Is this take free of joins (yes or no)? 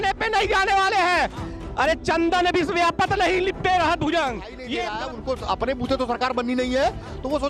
no